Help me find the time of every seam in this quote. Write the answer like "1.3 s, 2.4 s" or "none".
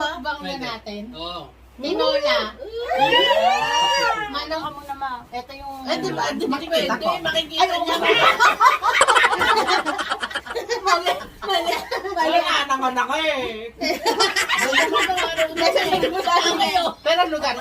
4.5 s, 16.4 s